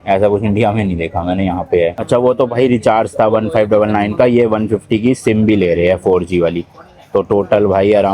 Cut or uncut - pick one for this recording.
uncut